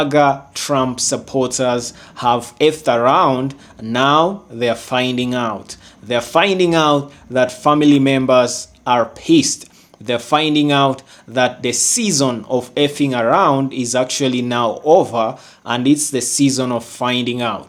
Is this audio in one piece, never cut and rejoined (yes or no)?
yes